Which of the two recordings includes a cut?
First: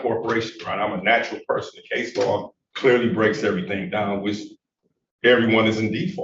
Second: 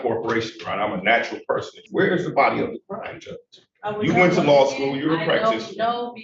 second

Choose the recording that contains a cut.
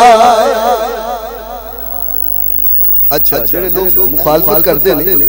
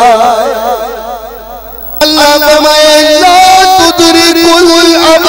second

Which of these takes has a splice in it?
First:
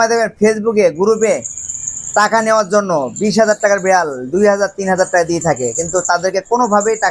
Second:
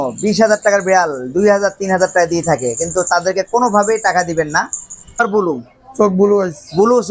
second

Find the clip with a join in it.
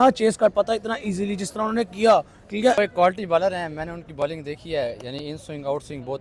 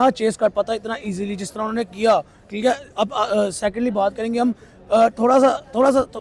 first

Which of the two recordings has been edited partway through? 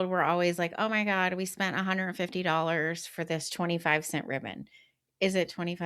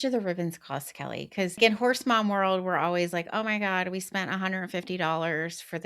second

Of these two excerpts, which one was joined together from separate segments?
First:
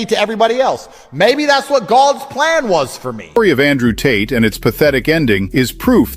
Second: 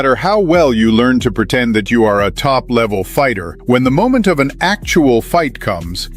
first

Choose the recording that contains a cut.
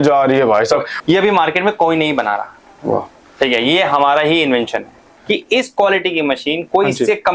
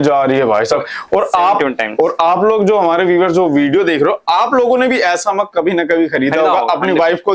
first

